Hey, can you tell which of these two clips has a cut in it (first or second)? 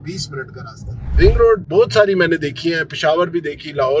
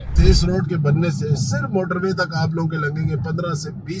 first